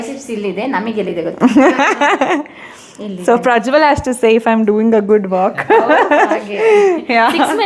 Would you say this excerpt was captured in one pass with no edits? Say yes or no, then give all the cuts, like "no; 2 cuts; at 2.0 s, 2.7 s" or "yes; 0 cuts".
yes; 0 cuts